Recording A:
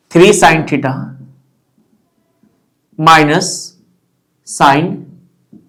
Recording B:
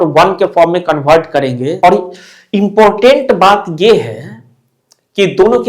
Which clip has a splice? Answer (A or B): B